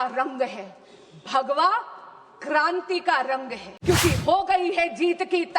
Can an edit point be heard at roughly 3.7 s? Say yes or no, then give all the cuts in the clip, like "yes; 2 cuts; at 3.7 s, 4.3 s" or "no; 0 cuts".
yes; 1 cut; at 3.7 s